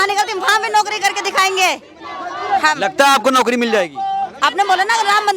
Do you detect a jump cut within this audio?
no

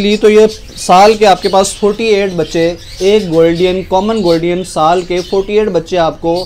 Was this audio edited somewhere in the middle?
no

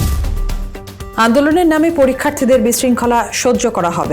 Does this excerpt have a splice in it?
yes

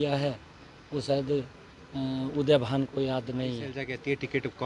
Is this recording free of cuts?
no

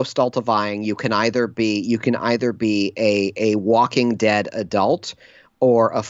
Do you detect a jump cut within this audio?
no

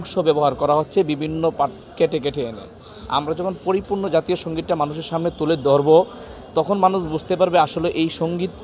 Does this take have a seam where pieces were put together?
no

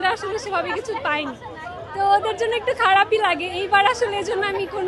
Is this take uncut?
yes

